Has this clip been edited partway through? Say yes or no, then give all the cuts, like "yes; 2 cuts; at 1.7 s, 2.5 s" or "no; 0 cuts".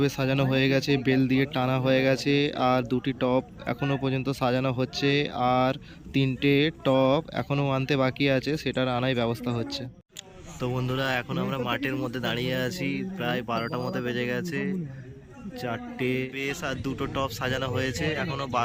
no; 0 cuts